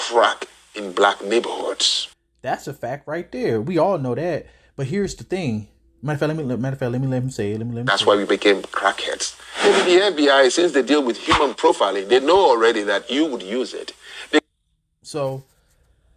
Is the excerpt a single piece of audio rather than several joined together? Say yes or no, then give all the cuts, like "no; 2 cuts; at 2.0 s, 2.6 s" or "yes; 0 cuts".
yes; 0 cuts